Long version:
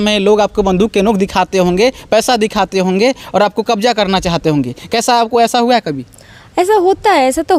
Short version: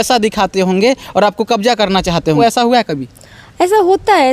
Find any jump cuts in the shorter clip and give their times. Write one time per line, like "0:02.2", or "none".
0:02.4